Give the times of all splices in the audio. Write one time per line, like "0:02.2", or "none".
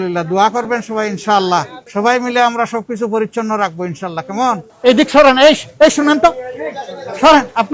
0:01.8
0:04.7